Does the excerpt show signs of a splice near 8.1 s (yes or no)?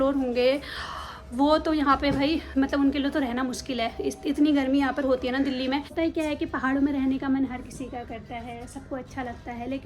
no